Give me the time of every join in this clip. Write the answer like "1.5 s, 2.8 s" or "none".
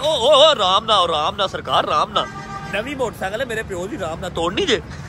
none